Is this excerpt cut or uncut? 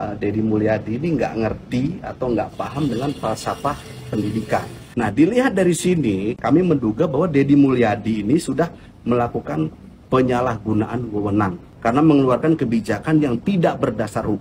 cut